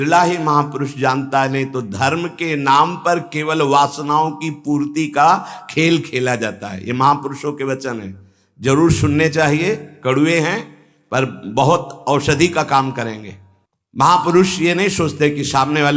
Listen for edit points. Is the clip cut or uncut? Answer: uncut